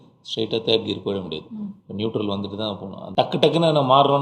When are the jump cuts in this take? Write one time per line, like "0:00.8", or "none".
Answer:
0:02.9